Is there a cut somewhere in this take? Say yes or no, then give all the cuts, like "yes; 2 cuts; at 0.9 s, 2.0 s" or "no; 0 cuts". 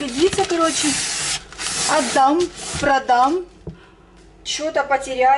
no; 0 cuts